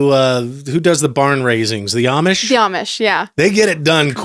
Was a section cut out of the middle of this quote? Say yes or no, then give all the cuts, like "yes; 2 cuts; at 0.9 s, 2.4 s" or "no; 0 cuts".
yes; 1 cut; at 3.3 s